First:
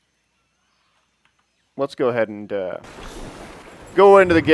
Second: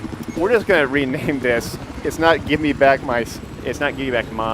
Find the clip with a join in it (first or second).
second